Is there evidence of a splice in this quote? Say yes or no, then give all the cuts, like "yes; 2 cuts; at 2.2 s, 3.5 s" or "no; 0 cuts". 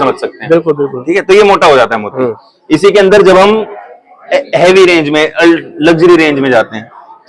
no; 0 cuts